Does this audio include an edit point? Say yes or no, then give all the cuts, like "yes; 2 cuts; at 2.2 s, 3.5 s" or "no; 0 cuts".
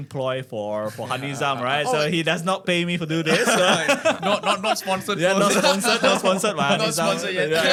no; 0 cuts